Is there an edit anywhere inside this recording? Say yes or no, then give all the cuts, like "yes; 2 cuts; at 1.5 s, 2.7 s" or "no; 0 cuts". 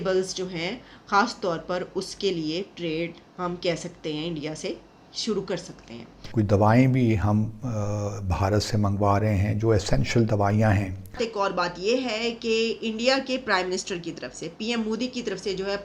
yes; 2 cuts; at 6.2 s, 11.0 s